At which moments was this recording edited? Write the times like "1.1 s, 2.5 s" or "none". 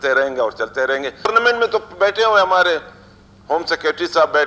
1.3 s